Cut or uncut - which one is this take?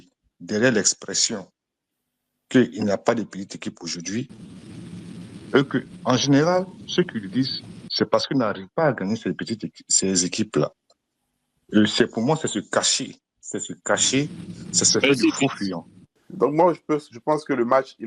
cut